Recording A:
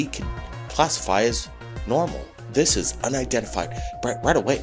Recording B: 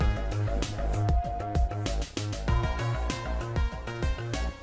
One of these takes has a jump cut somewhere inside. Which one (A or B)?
B